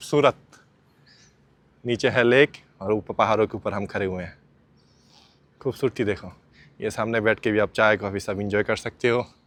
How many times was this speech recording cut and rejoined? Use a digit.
0